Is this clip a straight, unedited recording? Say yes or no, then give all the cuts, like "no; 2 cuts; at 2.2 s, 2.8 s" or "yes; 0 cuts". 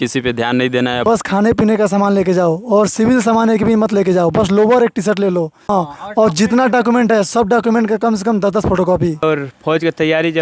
no; 3 cuts; at 1.0 s, 5.5 s, 9.2 s